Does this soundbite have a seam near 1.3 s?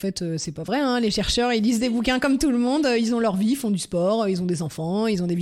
no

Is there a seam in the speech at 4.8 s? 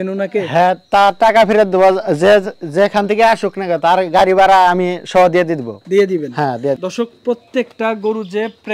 no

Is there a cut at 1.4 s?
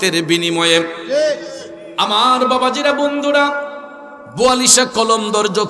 no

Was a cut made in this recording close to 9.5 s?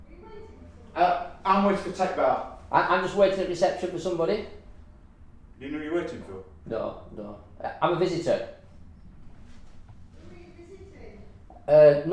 no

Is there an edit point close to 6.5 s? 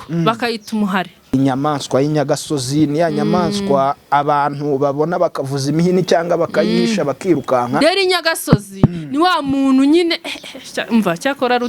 no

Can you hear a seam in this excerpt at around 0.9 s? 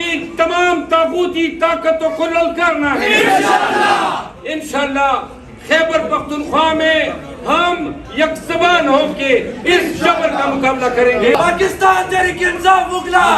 no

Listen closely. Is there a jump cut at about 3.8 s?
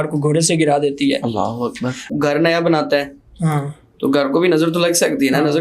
no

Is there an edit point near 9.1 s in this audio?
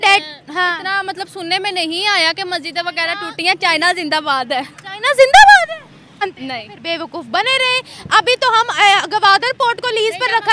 no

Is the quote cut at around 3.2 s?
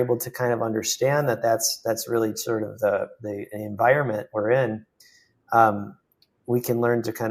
no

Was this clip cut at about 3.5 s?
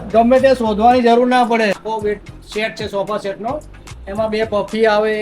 no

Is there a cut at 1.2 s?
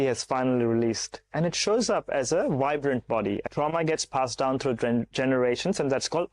no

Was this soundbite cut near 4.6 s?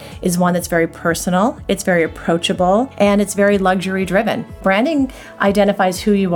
yes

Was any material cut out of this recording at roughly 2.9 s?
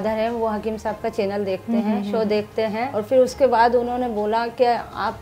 yes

